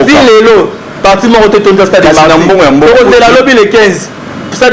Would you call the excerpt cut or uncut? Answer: uncut